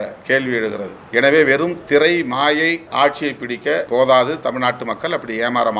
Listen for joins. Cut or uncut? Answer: cut